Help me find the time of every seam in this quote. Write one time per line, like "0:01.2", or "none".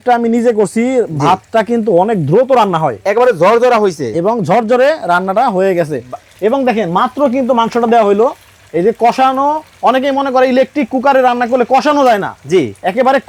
none